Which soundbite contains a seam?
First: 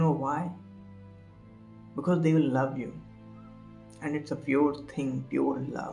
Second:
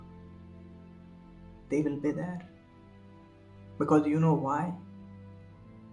second; 1 cut; at 1.7 s

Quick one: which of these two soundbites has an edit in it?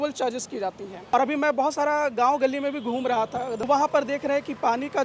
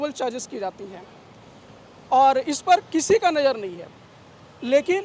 first; 2 cuts; at 1.1 s, 3.6 s

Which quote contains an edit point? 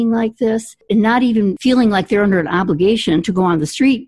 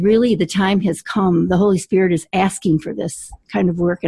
first; 2 cuts; at 0.8 s, 1.6 s

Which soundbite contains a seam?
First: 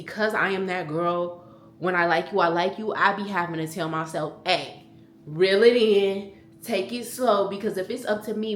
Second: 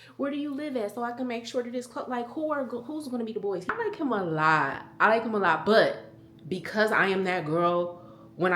second; 1 cut; at 3.7 s

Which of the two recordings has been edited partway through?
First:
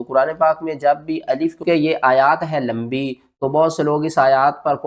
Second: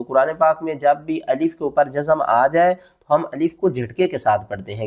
first; 1 cut; at 1.6 s

